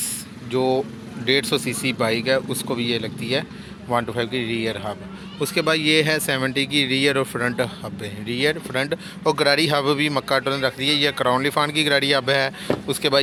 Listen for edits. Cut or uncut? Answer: uncut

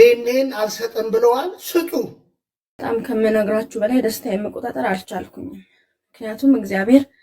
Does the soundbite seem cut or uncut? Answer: cut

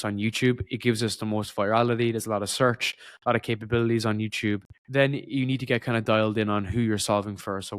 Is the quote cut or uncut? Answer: cut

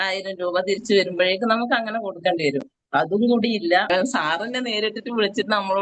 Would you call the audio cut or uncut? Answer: cut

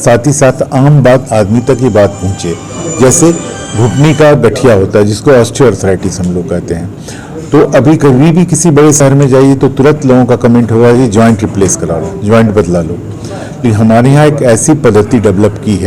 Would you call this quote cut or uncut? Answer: uncut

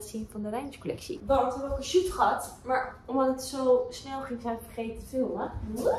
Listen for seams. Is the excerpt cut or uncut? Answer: uncut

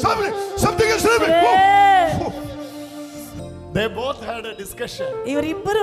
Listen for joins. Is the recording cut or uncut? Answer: cut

